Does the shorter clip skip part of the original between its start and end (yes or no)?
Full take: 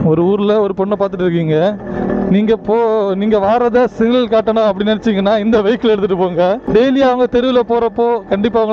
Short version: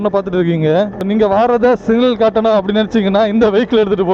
yes